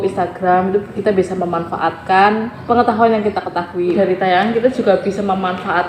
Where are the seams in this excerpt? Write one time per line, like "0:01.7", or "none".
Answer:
0:02.5
0:04.0